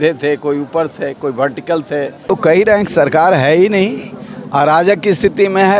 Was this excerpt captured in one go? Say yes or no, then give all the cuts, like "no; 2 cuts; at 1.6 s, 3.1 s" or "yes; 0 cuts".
no; 1 cut; at 2.2 s